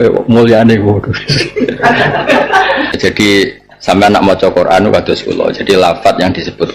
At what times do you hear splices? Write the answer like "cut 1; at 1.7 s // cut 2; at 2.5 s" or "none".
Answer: cut 1; at 3.0 s